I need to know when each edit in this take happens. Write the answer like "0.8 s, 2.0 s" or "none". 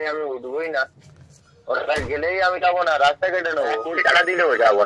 3.9 s